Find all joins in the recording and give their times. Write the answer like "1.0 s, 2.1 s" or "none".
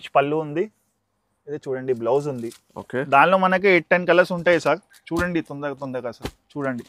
none